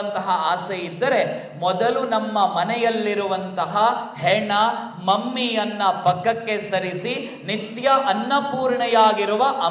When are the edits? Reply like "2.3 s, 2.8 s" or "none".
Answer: none